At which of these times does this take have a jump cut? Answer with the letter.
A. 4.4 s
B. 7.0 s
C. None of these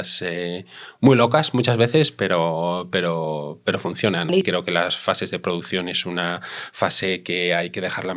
A